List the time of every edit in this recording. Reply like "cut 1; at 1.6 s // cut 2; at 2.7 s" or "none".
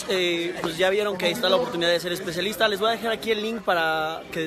none